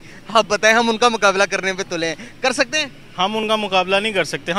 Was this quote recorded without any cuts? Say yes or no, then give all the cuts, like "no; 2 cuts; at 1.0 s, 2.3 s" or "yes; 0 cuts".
yes; 0 cuts